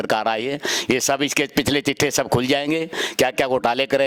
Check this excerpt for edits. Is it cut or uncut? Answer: uncut